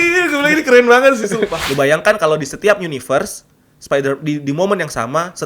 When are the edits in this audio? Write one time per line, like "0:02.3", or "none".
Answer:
0:01.6